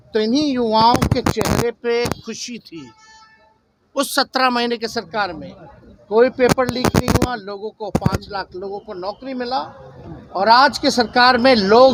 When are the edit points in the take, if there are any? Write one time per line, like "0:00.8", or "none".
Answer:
none